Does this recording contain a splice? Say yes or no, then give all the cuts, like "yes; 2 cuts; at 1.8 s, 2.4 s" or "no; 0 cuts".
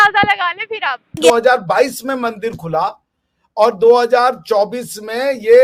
yes; 1 cut; at 1.2 s